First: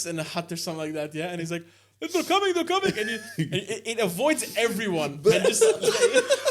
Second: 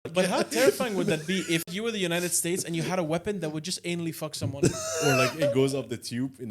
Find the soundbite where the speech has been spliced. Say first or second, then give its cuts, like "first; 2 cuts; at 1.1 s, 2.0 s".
second; 1 cut; at 1.7 s